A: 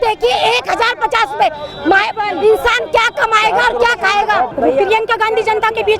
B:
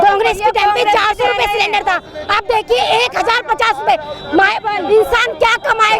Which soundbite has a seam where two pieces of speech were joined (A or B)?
A